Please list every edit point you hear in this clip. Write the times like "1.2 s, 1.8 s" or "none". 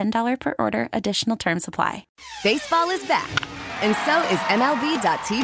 2.1 s